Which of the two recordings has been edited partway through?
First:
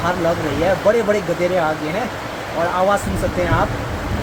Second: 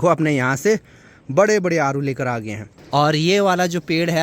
second; 1 cut; at 2.8 s

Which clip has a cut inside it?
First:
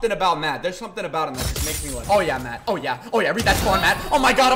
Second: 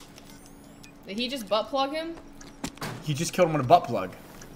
first; 1 cut; at 2.0 s

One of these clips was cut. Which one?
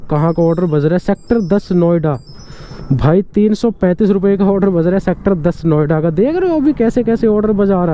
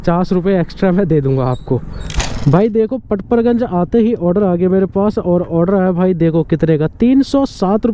second; 1 cut; at 2.2 s

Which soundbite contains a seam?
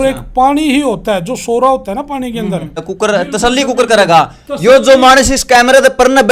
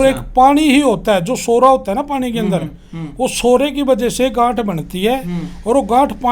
first; 1 cut; at 2.9 s

